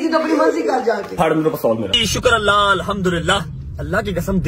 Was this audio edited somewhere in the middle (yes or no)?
yes